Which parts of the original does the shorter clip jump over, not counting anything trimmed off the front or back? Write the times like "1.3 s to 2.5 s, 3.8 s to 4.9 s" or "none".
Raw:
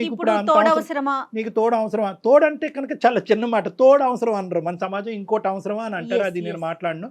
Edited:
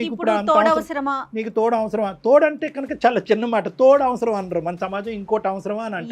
none